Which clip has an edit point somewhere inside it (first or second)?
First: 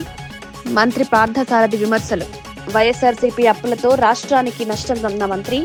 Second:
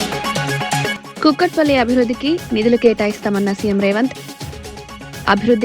second